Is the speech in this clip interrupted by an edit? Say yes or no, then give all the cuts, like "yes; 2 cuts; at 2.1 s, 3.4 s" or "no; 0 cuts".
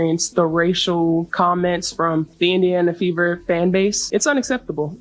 no; 0 cuts